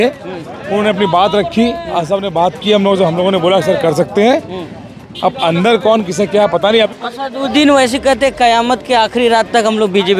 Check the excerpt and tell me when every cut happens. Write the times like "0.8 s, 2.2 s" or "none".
6.9 s